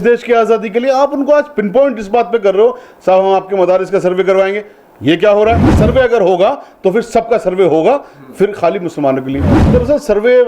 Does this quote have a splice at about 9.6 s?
yes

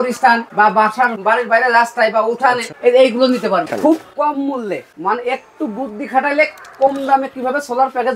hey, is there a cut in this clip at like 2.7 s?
yes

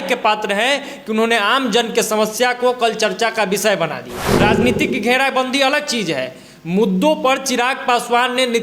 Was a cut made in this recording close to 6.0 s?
no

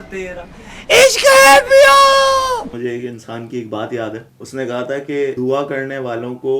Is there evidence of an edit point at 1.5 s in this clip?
no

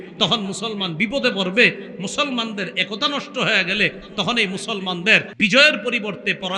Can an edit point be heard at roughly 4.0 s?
no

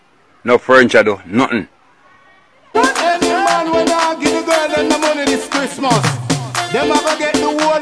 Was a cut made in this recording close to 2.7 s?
yes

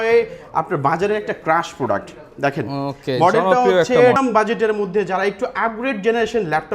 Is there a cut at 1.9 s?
no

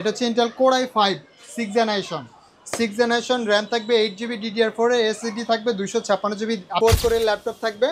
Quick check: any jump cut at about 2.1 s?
no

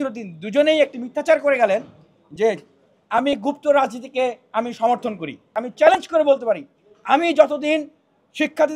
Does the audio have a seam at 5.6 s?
yes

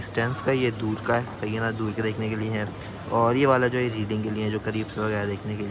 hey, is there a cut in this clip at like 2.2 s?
no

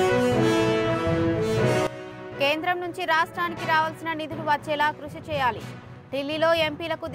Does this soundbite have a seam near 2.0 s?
yes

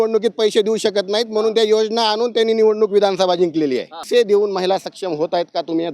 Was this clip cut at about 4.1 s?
yes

